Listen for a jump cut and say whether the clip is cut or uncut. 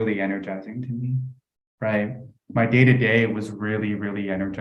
uncut